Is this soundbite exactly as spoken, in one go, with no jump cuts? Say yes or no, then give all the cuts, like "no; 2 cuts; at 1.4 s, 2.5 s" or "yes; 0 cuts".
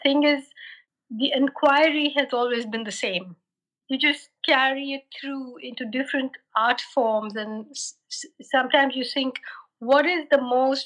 no; 1 cut; at 3.7 s